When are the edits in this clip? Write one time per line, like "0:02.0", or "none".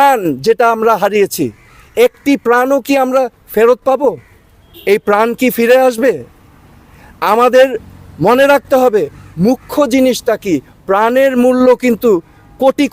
none